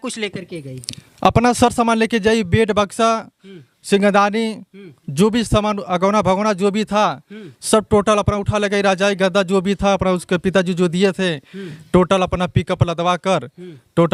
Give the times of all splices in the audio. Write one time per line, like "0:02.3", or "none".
none